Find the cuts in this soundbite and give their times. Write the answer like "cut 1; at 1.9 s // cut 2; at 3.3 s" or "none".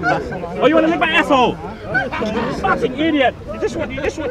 none